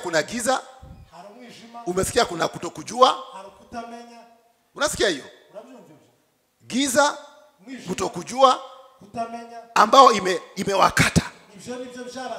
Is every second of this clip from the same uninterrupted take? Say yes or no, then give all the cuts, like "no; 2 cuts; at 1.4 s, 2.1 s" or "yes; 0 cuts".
yes; 0 cuts